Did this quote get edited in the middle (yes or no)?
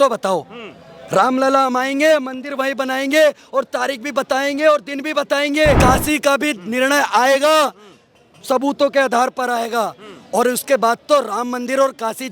yes